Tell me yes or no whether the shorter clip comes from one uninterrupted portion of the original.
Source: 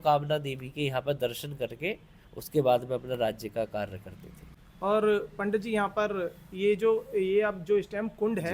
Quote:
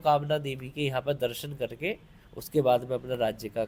yes